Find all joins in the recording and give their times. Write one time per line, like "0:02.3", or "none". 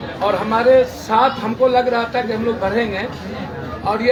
none